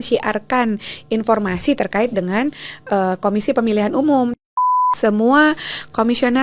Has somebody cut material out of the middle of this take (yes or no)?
yes